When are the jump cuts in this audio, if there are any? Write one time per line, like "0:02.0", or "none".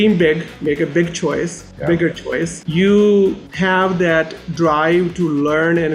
0:01.6
0:02.6
0:03.5